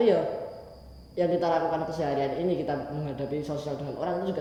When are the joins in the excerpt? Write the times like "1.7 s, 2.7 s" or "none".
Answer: none